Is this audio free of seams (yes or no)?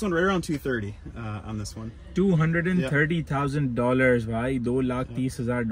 yes